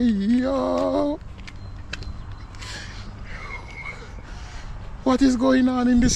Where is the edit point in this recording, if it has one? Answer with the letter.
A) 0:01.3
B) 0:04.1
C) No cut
C